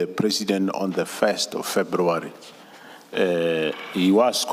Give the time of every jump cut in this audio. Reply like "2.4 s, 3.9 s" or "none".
none